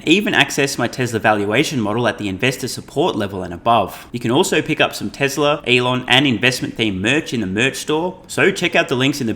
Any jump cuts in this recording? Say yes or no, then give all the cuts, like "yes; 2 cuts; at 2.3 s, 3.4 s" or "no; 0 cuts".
yes; 3 cuts; at 4.1 s, 5.6 s, 8.2 s